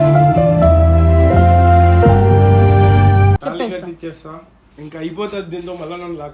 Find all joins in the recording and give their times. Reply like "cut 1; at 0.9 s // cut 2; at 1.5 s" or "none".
cut 1; at 3.4 s